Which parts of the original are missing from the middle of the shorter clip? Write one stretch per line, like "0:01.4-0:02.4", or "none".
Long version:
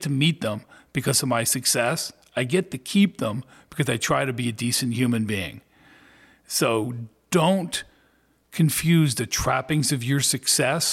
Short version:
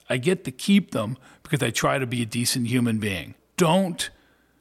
0:05.6-0:07.1